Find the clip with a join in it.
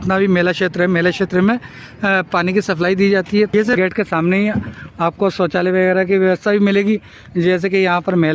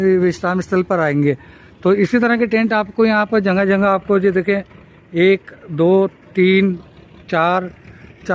first; 1 cut; at 3.7 s

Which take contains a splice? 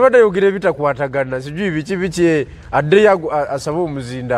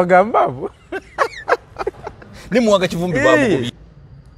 second; 1 cut; at 3.4 s

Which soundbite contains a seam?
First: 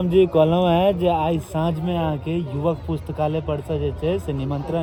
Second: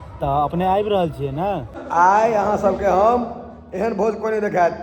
second; 1 cut; at 1.7 s

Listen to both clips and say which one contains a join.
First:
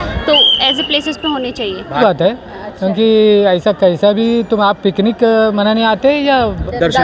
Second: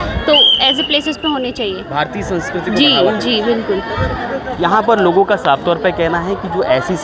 first; 1 cut; at 2.0 s

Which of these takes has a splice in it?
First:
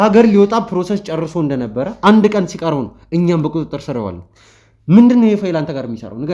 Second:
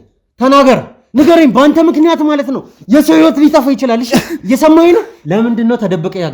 second; 2 cuts; at 1.0 s, 5.1 s

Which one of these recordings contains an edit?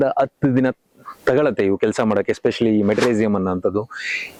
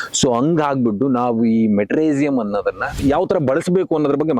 second; 1 cut; at 3.0 s

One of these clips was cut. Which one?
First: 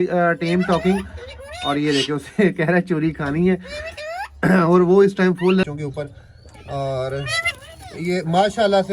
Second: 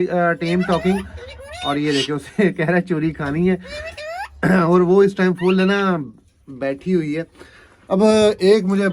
first; 1 cut; at 5.6 s

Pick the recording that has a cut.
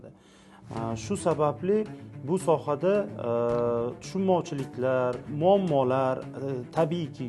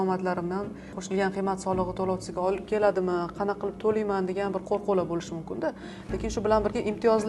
first; 1 cut; at 5.3 s

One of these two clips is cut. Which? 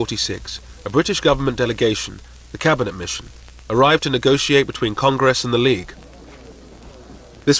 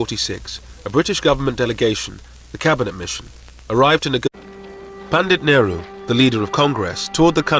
first; 1 cut; at 4.2 s

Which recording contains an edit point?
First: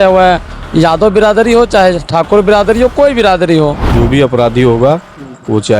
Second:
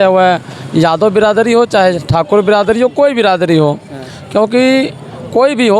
first; 1 cut; at 3.8 s

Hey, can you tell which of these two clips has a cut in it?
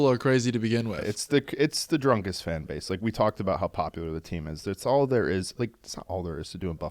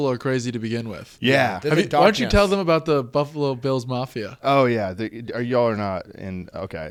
first; 1 cut; at 1.0 s

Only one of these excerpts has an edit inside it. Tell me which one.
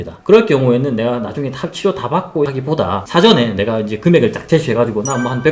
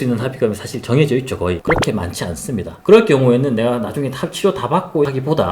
second; 1 cut; at 1.6 s

